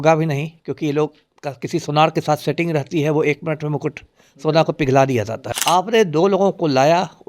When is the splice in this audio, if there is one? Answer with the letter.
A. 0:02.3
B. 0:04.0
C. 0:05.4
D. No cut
C